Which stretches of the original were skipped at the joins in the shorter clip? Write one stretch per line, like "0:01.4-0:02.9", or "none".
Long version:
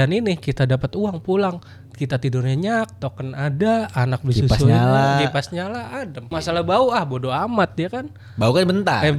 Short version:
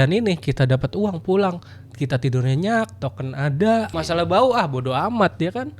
0:03.9-0:06.3